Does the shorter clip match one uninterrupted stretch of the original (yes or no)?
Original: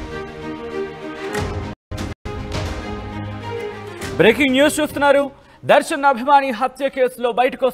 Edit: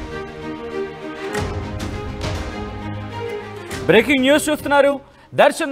no